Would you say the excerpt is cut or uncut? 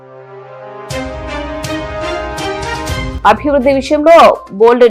cut